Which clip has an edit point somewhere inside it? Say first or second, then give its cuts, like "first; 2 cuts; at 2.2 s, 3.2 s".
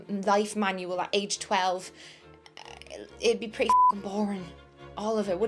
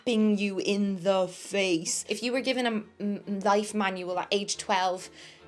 second; 1 cut; at 2.0 s